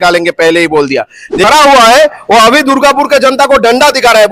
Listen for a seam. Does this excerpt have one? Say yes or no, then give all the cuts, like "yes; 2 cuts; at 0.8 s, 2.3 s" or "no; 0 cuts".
yes; 1 cut; at 1.4 s